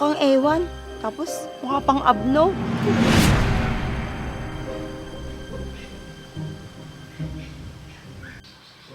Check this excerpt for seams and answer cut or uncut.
uncut